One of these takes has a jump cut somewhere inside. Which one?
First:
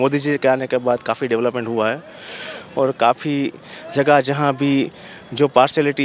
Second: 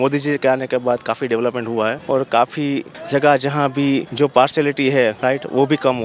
second; 4 cuts; at 2.0 s, 2.9 s, 4.1 s, 5.2 s

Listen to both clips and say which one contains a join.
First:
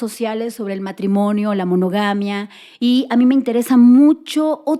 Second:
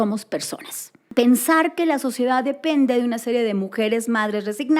second; 1 cut; at 1.0 s

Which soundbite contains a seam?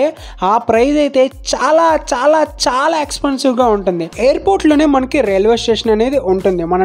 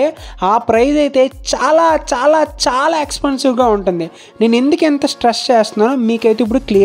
first; 1 cut; at 4.1 s

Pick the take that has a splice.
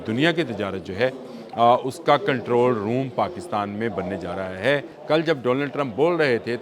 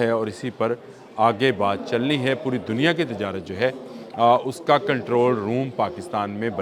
first; 1 cut; at 4.9 s

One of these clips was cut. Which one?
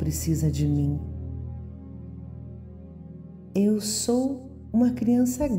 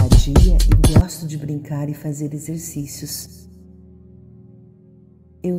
second; 1 cut; at 1.0 s

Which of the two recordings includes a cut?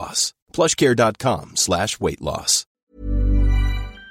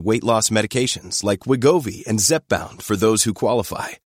first; 1 cut; at 2.7 s

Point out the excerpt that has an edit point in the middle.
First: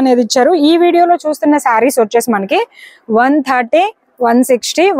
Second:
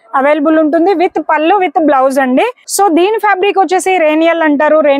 second; 1 cut; at 2.6 s

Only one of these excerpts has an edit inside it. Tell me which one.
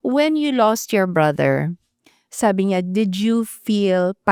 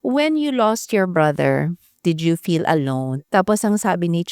second; 2 cuts; at 1.9 s, 3.2 s

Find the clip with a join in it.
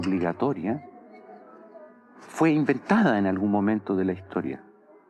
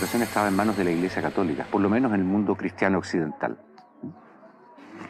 second; 1 cut; at 2.7 s

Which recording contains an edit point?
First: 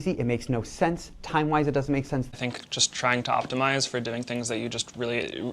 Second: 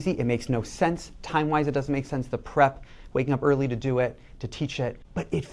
first; 1 cut; at 2.3 s

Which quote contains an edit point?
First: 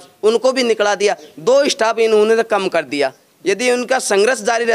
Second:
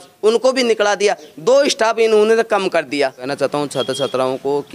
second; 1 cut; at 3.3 s

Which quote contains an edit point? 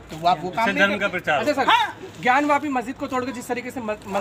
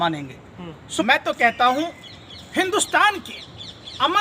second; 1 cut; at 1.0 s

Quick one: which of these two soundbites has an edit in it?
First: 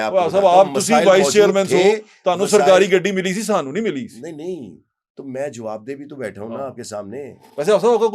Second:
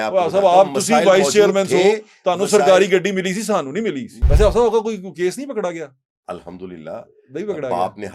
second; 1 cut; at 4.1 s

